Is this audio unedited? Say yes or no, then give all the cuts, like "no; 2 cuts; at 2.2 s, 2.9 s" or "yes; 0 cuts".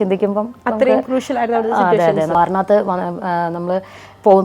no; 1 cut; at 2.3 s